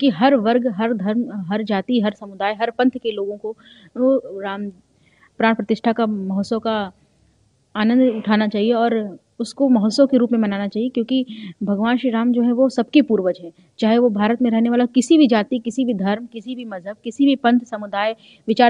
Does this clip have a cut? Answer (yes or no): no